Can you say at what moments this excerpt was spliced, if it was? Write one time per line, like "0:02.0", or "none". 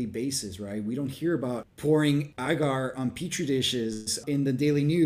0:01.7
0:02.3
0:04.1